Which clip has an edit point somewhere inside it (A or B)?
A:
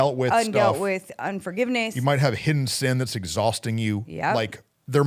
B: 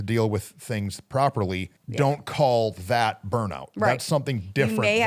B